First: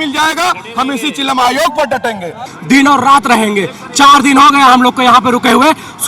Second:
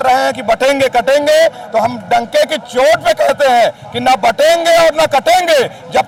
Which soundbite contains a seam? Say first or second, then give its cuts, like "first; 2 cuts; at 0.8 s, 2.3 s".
first; 1 cut; at 2.5 s